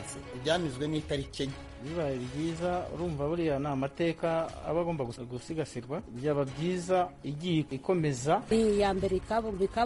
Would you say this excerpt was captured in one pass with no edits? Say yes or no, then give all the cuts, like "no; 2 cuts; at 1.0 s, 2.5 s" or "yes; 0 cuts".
no; 1 cut; at 7.7 s